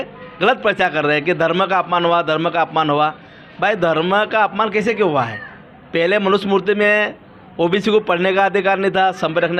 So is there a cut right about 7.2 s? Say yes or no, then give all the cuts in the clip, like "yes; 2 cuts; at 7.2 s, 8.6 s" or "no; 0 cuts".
no; 0 cuts